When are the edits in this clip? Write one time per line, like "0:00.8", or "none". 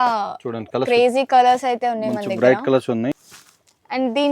0:03.2